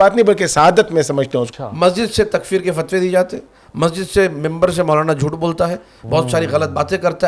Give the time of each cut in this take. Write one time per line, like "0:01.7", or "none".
0:01.5